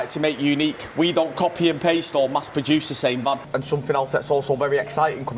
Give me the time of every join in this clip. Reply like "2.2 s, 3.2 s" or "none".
3.4 s